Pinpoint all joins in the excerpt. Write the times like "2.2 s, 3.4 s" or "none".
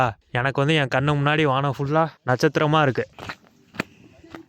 3.2 s